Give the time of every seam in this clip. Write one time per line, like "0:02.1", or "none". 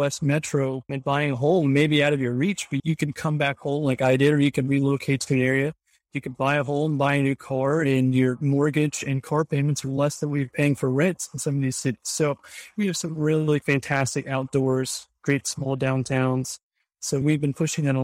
0:13.6